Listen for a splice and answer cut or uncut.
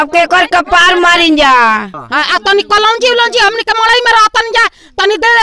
cut